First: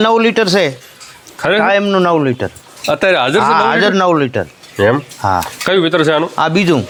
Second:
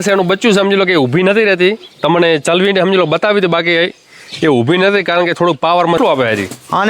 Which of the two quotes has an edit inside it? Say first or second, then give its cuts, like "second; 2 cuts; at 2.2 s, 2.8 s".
second; 1 cut; at 6.0 s